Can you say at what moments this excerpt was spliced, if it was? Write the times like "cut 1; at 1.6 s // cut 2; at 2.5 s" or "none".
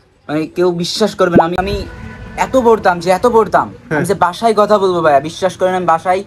cut 1; at 1.6 s